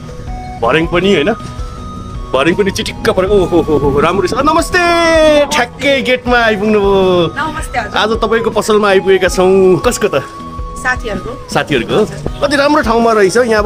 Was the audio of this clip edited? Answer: yes; 1 cut; at 9.8 s

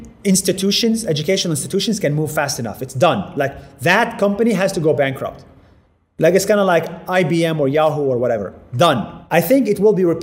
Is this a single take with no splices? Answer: yes; 0 cuts

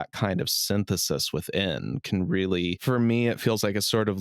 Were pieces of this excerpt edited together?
yes; 1 cut; at 2.8 s

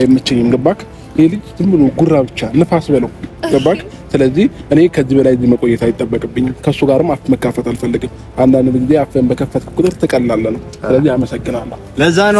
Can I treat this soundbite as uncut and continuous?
yes; 0 cuts

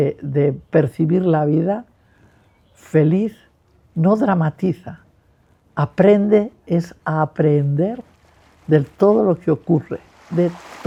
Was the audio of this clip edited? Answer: no; 0 cuts

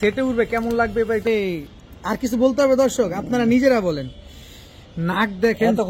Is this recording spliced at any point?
yes; 1 cut; at 1.3 s

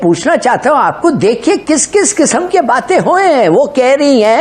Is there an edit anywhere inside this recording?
no; 0 cuts

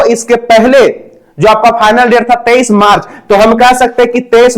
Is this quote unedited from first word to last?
yes; 0 cuts

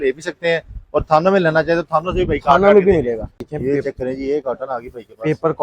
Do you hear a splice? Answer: yes; 1 cut; at 3.5 s

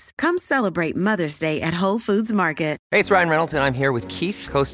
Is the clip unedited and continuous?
no; 1 cut; at 2.8 s

